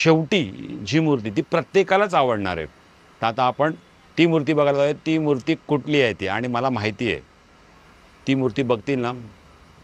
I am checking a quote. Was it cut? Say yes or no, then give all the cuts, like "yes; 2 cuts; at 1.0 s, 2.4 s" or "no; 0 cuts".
no; 0 cuts